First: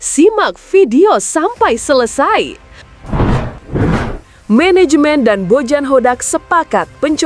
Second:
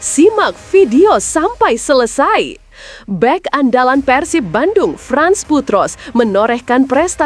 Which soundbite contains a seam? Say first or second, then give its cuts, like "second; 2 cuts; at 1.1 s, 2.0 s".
first; 2 cuts; at 2.9 s, 4.1 s